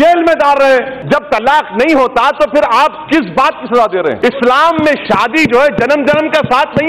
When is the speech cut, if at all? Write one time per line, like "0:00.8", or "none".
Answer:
0:00.9
0:04.2